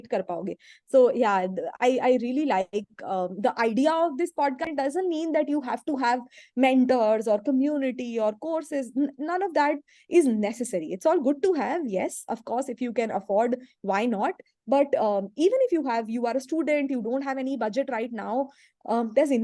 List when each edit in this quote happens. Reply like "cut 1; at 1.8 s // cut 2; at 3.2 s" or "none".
cut 1; at 4.7 s